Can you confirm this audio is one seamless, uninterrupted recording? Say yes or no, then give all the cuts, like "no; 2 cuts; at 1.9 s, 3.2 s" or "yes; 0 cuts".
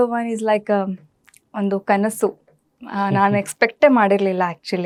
yes; 0 cuts